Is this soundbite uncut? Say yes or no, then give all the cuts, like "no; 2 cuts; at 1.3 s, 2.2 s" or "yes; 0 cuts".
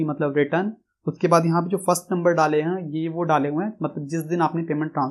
yes; 0 cuts